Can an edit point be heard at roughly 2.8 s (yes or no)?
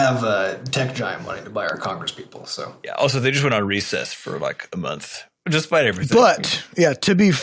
no